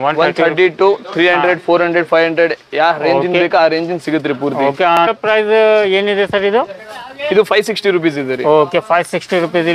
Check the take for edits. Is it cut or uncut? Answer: cut